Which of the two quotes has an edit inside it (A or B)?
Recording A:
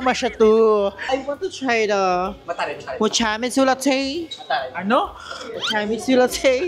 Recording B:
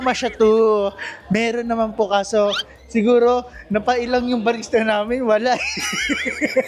A